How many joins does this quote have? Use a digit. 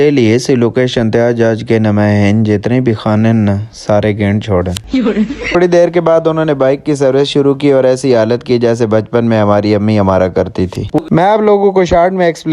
2